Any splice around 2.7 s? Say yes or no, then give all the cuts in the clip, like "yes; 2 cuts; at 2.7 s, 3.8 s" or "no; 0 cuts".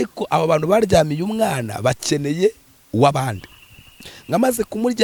no; 0 cuts